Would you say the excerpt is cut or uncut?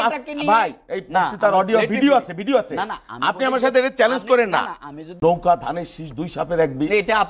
cut